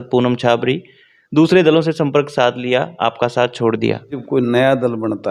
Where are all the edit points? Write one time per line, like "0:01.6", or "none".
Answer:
0:04.2